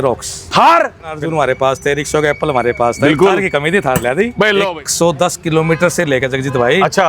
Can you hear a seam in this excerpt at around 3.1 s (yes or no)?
no